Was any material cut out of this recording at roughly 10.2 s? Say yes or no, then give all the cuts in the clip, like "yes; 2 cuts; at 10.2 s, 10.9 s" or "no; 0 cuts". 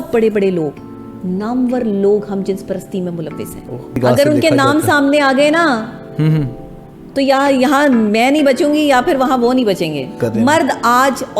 yes; 2 cuts; at 4.0 s, 10.2 s